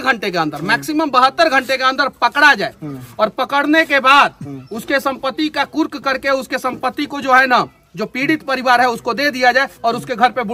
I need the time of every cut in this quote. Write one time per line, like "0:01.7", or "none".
none